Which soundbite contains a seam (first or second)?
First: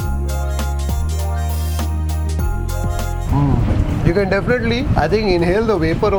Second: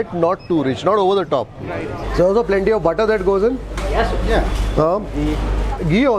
second